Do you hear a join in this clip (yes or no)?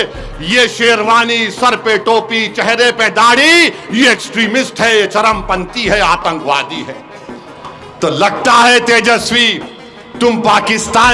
no